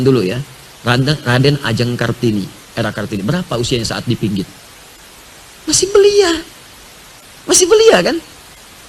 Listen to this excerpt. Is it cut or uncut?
uncut